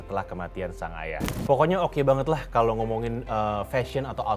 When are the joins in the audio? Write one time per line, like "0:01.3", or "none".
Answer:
0:01.3

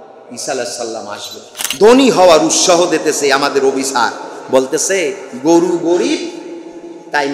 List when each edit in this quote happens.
0:01.6

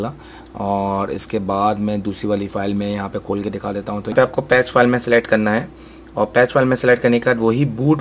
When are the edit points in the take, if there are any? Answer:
0:04.1

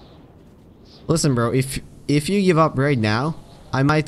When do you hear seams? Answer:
none

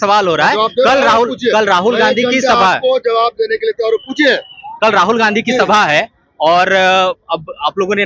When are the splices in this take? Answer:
none

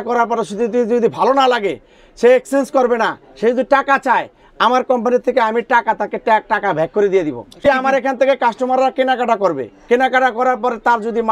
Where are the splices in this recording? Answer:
0:07.6

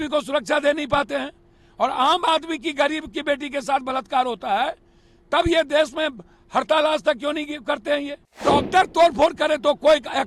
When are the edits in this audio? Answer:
0:08.4

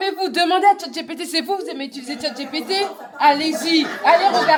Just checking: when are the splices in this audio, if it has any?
none

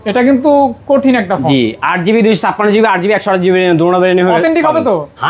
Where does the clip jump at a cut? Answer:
none

